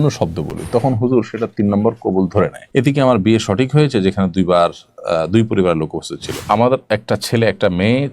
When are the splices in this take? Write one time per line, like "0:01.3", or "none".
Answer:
0:02.6
0:06.4